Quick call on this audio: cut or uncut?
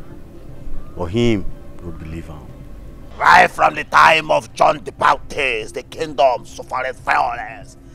cut